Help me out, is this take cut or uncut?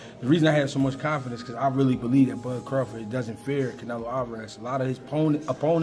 uncut